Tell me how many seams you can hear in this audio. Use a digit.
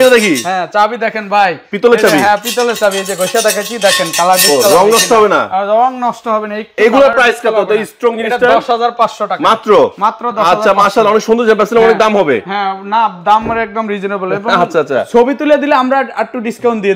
0